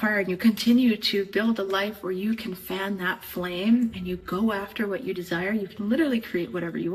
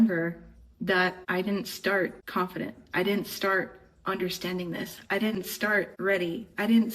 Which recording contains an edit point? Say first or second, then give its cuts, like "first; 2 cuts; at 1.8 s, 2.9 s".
second; 3 cuts; at 1.2 s, 2.2 s, 5.9 s